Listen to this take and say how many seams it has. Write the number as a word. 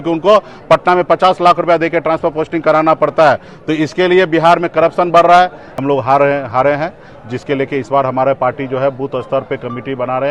one